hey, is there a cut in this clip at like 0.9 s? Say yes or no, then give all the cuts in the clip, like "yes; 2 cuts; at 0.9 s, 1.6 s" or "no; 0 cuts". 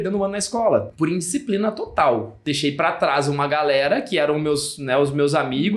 yes; 2 cuts; at 0.9 s, 2.3 s